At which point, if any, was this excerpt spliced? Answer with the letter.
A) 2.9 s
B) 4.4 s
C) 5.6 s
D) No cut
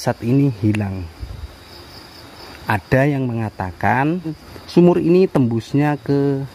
B